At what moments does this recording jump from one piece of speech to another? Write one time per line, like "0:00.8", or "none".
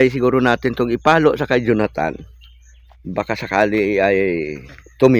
none